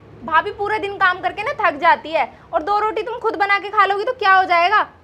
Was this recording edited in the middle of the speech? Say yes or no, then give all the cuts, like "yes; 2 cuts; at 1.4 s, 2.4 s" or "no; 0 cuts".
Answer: no; 0 cuts